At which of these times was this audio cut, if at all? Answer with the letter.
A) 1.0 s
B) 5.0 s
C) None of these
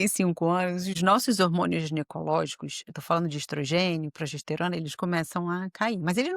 A